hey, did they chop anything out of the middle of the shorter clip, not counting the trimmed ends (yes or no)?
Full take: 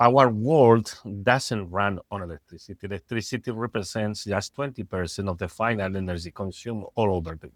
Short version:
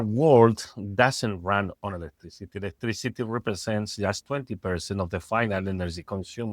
no